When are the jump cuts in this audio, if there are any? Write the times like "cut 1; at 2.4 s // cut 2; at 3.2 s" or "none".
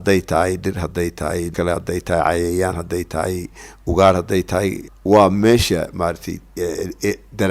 cut 1; at 1.5 s // cut 2; at 4.9 s